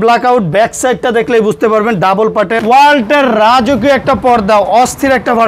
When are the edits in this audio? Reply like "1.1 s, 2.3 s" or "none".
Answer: 2.6 s